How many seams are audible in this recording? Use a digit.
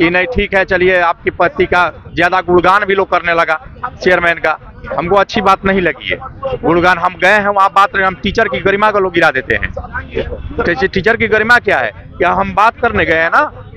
0